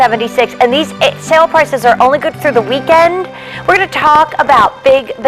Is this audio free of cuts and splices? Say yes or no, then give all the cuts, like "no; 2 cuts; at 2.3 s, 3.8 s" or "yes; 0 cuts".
yes; 0 cuts